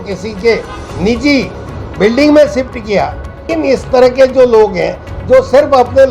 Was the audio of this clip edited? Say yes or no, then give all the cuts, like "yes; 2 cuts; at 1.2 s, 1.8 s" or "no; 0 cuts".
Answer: yes; 1 cut; at 3.5 s